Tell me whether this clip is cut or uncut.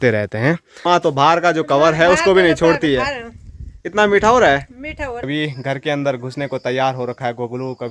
cut